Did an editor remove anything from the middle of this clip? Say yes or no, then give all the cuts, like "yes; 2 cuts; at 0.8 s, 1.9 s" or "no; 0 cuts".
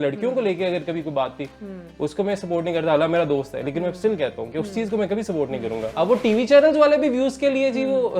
yes; 1 cut; at 5.8 s